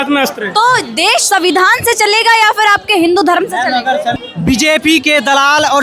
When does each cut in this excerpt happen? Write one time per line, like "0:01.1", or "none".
0:04.2